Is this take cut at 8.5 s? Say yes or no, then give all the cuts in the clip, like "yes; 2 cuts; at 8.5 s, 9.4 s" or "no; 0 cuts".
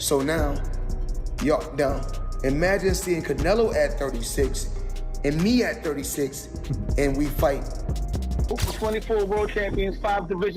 yes; 1 cut; at 8.5 s